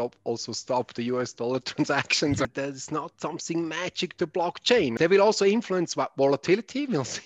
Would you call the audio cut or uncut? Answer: cut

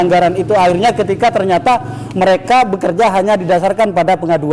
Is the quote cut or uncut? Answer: uncut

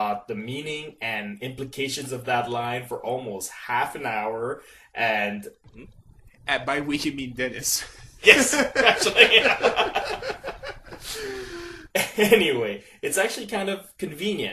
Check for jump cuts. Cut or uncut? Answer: uncut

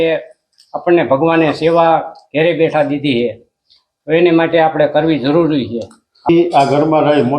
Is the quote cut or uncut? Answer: cut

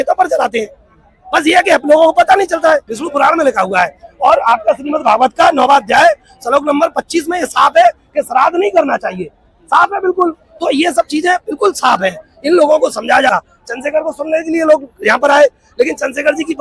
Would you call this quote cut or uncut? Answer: cut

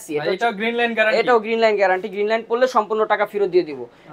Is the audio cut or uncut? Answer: uncut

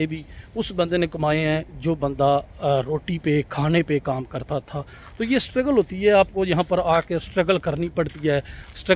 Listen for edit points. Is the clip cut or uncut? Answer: uncut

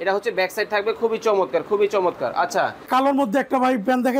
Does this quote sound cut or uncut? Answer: cut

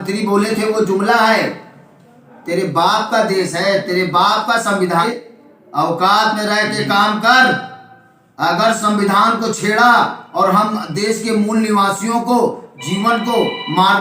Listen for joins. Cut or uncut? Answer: cut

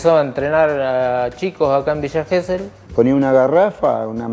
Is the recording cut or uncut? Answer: cut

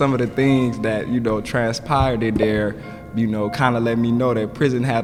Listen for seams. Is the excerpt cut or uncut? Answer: uncut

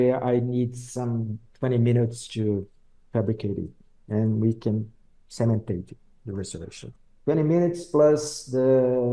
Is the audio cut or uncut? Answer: uncut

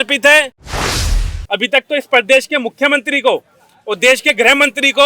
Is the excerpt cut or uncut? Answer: cut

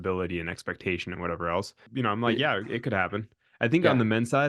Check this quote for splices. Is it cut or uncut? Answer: cut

